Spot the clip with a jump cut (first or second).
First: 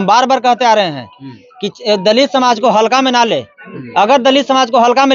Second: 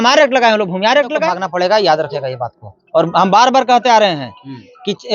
second